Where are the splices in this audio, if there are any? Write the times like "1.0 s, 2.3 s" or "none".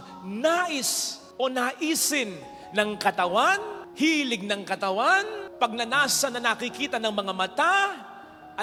none